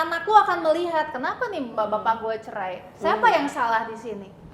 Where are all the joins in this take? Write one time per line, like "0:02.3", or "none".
none